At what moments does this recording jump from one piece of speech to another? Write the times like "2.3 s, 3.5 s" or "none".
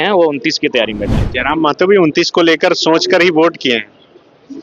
1.2 s